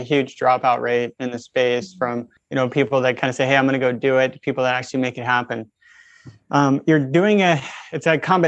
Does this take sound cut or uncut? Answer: cut